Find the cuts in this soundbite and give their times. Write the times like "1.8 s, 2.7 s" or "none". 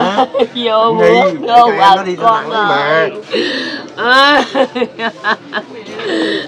none